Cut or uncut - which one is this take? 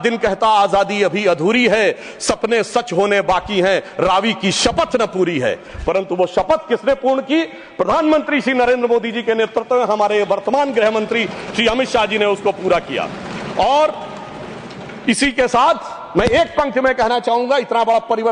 uncut